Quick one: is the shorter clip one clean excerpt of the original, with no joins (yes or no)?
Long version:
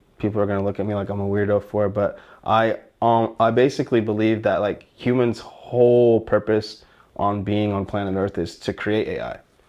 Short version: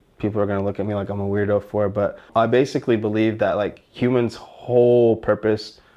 no